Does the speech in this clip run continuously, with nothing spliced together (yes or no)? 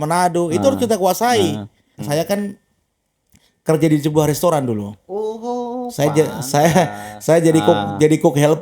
no